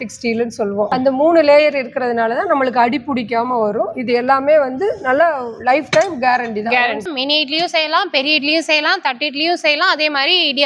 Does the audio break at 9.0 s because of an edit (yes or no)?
no